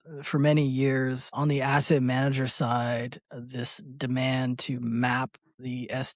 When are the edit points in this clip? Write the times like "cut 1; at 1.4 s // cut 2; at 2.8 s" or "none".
cut 1; at 1.2 s